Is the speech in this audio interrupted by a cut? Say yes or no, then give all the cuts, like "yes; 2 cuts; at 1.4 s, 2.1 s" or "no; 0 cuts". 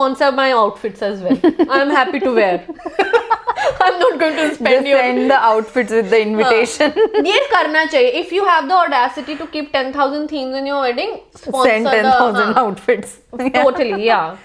no; 0 cuts